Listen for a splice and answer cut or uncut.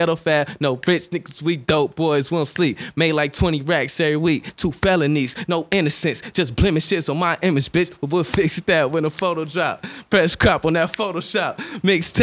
cut